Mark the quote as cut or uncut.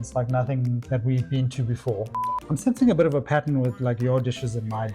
cut